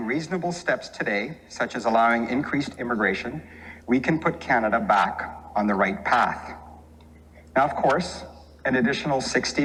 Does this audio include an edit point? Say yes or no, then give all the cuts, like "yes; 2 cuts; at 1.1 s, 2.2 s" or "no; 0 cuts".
no; 0 cuts